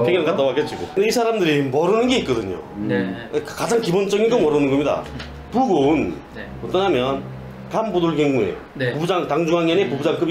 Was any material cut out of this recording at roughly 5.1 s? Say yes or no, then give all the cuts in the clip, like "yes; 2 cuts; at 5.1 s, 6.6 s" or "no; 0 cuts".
no; 1 cut; at 1.0 s